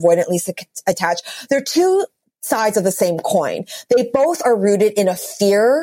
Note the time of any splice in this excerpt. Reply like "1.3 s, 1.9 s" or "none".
none